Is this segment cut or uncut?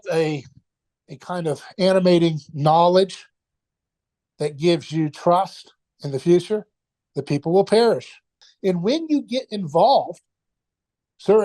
cut